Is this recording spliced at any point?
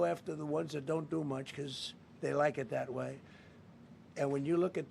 no; 0 cuts

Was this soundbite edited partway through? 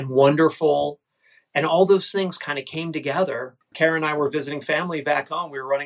yes; 1 cut; at 3.7 s

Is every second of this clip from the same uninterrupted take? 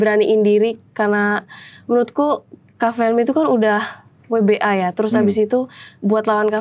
yes; 0 cuts

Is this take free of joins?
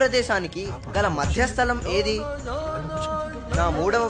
yes; 0 cuts

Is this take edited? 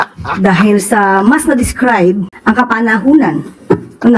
yes; 1 cut; at 2.3 s

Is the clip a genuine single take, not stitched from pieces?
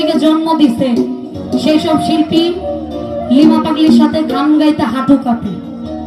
yes; 0 cuts

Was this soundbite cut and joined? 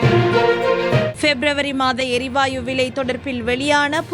yes; 1 cut; at 1.1 s

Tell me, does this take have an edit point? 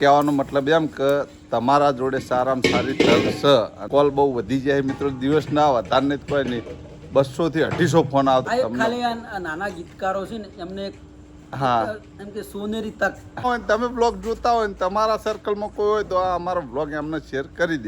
yes; 3 cuts; at 3.8 s, 8.5 s, 13.4 s

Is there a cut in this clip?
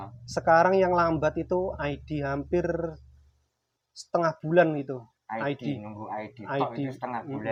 no; 0 cuts

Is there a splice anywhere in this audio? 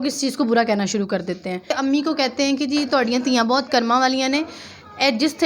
yes; 1 cut; at 1.7 s

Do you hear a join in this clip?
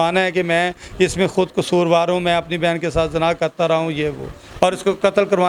no; 0 cuts

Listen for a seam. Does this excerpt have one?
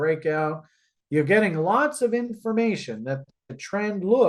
no; 0 cuts

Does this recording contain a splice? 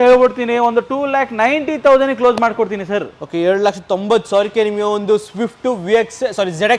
no; 0 cuts

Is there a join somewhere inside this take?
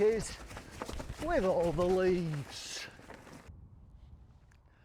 yes; 1 cut; at 3.5 s

